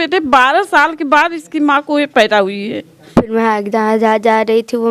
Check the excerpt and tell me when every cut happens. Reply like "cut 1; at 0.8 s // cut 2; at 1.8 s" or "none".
cut 1; at 3.0 s